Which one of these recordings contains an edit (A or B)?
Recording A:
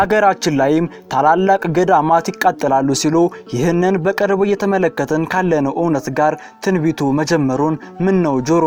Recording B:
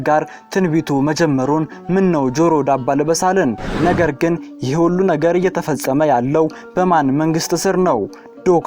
B